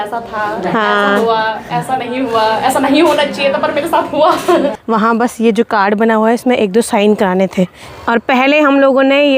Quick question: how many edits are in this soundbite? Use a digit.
2